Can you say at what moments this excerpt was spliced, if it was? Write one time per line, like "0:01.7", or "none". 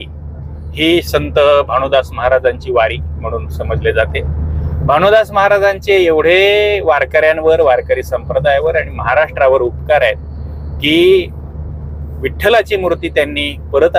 0:01.1